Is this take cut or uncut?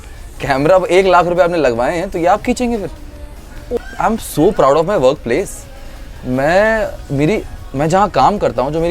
cut